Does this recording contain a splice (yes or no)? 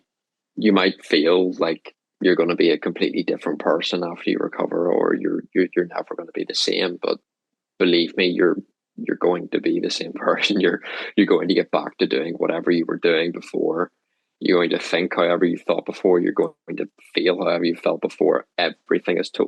no